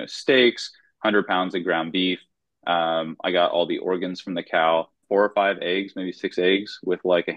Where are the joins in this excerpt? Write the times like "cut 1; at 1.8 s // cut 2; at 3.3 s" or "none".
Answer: cut 1; at 5.0 s